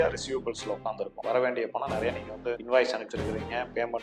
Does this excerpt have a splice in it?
yes; 2 cuts; at 1.1 s, 2.6 s

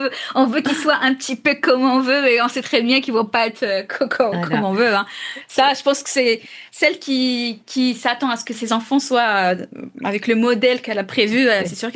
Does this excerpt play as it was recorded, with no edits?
yes; 0 cuts

